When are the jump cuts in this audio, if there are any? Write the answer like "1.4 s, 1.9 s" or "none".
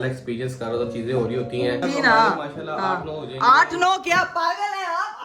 1.8 s